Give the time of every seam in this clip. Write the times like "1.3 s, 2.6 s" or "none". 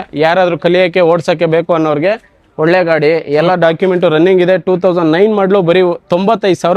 none